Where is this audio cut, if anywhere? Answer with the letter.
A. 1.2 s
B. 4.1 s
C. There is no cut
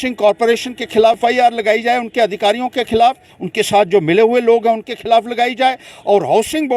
A